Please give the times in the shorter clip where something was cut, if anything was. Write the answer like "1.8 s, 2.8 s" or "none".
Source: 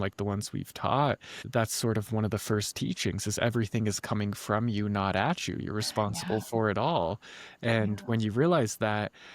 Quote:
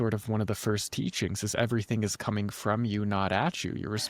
none